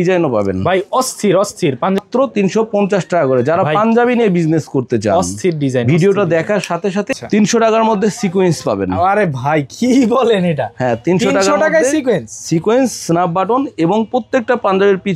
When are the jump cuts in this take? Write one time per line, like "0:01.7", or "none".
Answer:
0:02.0
0:07.1